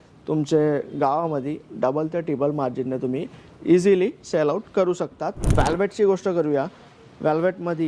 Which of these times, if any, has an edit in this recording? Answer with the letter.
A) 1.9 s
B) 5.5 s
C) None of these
B